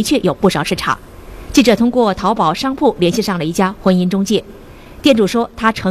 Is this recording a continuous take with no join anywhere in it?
no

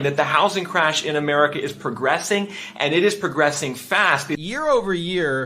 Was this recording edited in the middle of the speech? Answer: yes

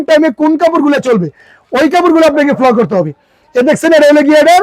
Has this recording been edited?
no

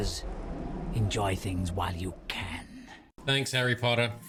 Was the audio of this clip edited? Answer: no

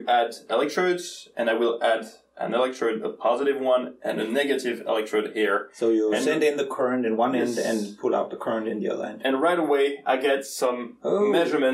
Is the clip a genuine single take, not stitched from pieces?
yes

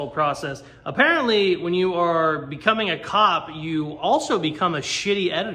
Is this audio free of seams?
yes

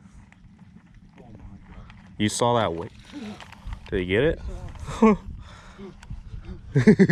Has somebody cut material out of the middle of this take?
no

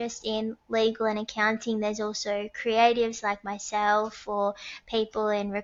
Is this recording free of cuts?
yes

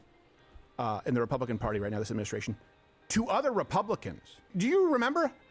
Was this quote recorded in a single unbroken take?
no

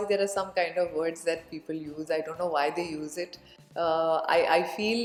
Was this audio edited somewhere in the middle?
no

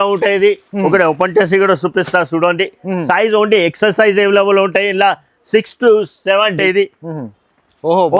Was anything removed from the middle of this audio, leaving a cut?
yes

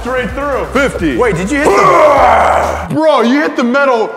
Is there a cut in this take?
yes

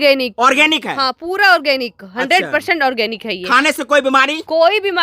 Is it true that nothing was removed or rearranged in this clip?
yes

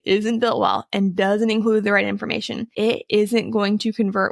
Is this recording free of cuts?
no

